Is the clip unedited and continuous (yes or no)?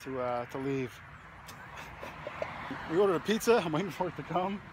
no